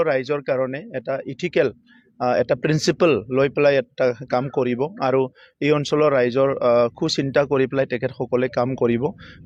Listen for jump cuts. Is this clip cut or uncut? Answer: uncut